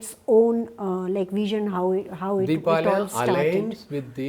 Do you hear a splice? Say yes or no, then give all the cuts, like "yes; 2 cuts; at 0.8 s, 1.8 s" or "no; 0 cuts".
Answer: no; 0 cuts